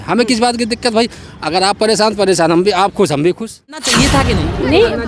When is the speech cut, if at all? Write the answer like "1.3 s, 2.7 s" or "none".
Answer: 3.9 s